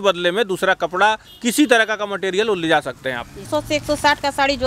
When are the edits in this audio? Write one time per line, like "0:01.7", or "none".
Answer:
0:03.4